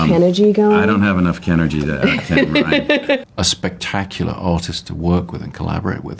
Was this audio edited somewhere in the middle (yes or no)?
yes